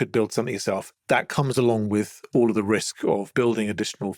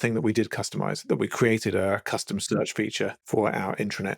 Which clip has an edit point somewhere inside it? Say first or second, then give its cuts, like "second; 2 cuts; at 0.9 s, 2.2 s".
second; 1 cut; at 3.2 s